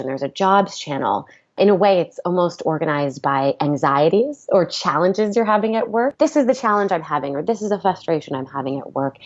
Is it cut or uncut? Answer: cut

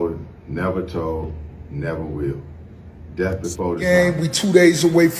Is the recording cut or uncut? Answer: cut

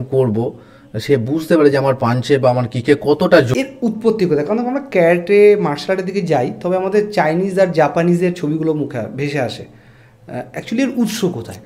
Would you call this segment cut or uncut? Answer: cut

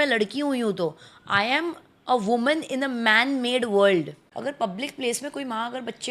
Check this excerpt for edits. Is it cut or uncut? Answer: cut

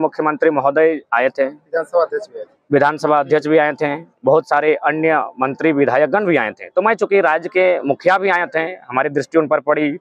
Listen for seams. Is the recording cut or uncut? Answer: uncut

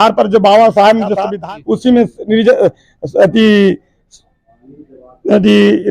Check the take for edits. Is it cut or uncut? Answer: cut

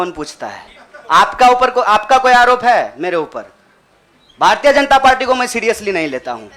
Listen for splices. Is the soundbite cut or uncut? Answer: uncut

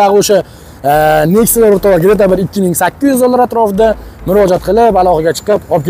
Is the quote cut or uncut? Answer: uncut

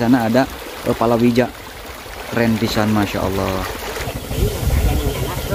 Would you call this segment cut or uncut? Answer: cut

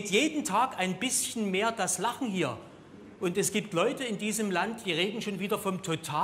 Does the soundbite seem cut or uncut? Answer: cut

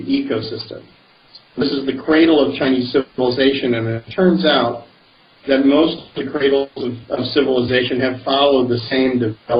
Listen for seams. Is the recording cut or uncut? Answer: cut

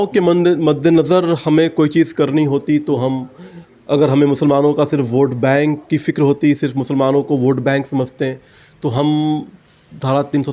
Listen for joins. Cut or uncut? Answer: uncut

